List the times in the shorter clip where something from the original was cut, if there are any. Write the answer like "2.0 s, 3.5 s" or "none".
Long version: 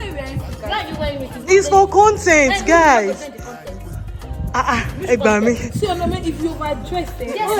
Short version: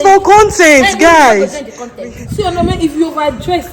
2.3 s